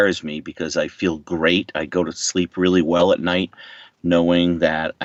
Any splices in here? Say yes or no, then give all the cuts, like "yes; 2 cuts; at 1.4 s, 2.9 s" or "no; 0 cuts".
no; 0 cuts